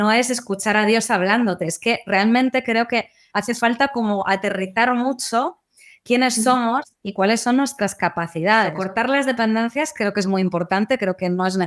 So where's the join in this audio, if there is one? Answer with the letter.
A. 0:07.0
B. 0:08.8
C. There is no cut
B